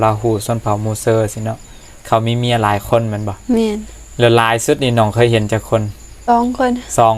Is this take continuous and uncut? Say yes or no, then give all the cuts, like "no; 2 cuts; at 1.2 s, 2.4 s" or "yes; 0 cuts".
no; 1 cut; at 6.1 s